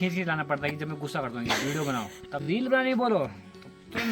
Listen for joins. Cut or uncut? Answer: cut